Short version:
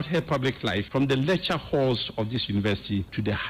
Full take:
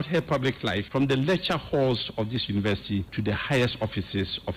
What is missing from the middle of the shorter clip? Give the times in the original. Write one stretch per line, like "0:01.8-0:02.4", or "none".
none

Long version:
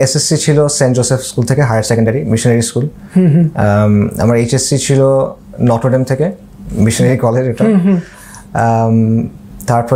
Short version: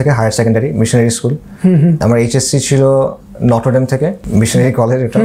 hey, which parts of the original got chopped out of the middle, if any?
0:03.5-0:04.2
0:06.4-0:06.7

